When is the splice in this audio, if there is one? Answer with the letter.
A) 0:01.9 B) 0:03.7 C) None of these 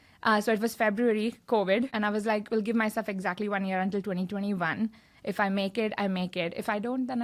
A